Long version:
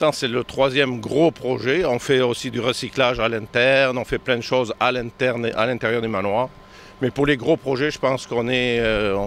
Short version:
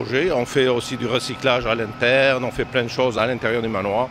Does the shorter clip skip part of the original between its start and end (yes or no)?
yes